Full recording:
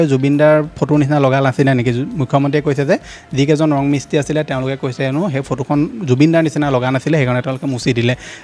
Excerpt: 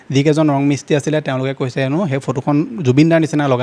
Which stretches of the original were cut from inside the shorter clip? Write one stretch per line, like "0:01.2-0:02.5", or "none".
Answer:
none